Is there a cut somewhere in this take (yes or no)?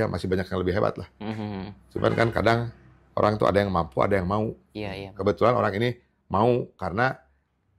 no